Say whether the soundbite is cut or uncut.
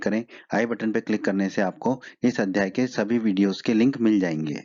uncut